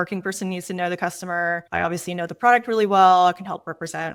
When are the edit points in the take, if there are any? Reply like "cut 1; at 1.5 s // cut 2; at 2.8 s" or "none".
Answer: none

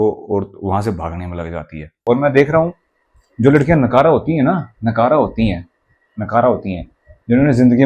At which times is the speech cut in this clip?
cut 1; at 2.0 s

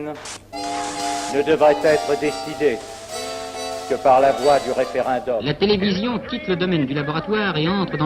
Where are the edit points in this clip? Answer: cut 1; at 5.5 s

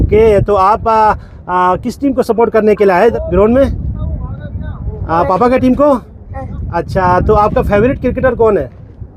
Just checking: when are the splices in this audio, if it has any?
cut 1; at 3.2 s

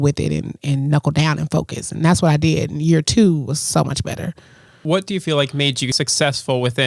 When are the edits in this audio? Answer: cut 1; at 5.9 s

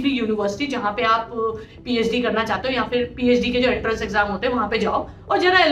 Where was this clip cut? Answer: none

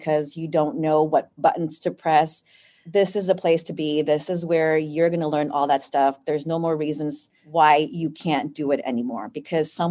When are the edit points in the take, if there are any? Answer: none

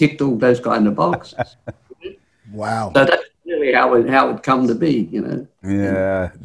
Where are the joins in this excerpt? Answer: cut 1; at 1.3 s

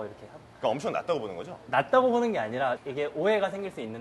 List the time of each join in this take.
cut 1; at 2.8 s

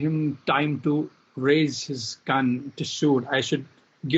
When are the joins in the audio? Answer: none

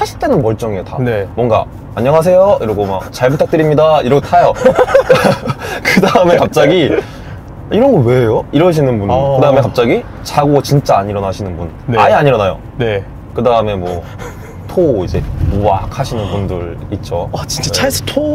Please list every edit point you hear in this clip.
none

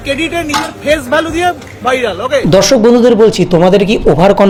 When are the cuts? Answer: none

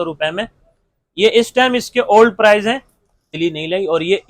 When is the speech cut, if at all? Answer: cut 1; at 3.2 s

